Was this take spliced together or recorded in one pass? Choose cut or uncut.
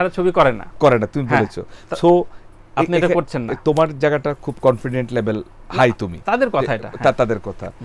uncut